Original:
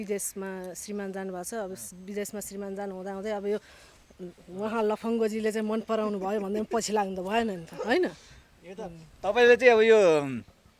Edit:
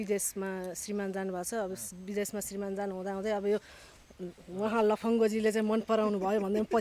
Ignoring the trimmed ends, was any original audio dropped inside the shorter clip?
no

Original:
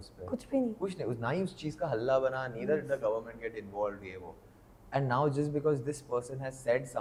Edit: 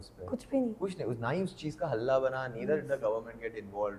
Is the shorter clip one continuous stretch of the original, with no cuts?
yes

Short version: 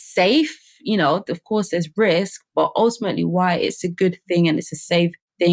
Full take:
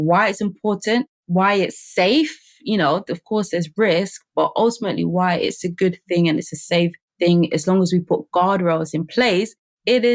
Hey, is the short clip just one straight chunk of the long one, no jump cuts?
yes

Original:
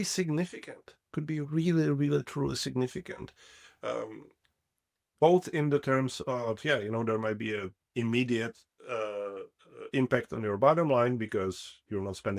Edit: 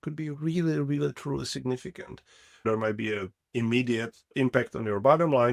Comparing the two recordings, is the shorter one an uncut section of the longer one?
no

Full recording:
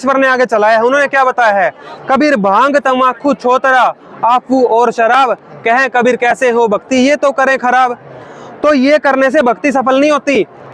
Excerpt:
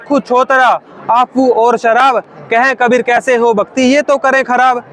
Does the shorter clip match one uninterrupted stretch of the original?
yes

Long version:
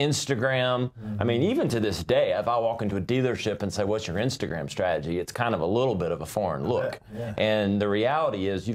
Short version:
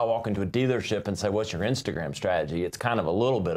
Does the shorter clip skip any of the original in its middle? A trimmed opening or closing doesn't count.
no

